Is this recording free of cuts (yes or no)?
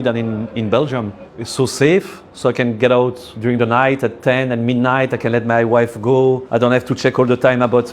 no